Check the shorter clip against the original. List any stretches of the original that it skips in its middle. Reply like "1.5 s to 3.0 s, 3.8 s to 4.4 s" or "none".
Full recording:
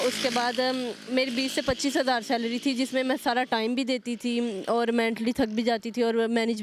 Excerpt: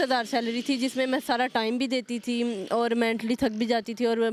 none